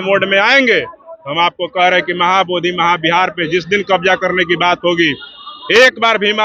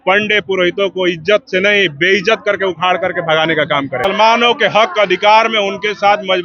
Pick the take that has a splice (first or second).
second